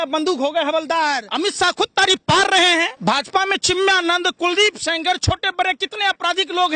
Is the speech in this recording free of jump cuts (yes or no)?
no